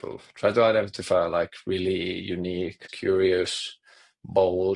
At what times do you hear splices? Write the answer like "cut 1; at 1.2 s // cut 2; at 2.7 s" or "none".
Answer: cut 1; at 2.9 s